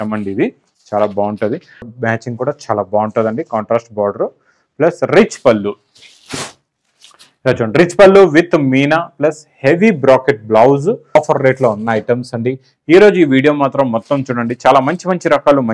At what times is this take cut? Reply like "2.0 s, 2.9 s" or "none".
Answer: 1.9 s, 11.2 s